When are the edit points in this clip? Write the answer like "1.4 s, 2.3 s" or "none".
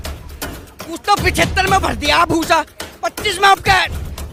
none